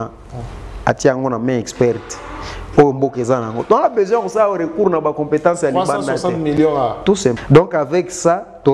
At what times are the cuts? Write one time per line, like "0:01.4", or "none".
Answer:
0:07.3